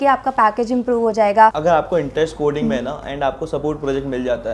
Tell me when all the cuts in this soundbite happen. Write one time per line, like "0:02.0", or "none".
0:01.6